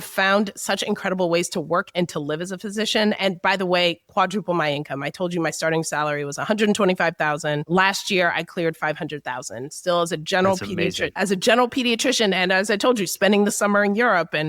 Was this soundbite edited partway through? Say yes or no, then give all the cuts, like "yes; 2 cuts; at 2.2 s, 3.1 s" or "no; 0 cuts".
no; 0 cuts